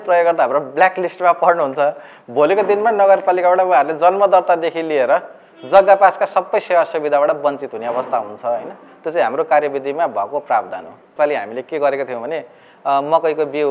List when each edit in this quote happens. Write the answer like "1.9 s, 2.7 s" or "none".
11.1 s